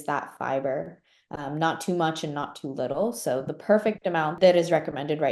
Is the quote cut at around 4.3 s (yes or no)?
yes